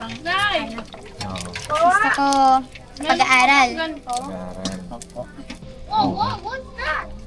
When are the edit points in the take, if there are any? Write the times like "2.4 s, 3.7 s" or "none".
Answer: 5.7 s